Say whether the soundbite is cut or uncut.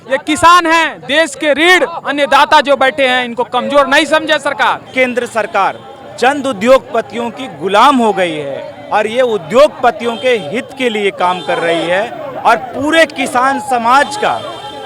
cut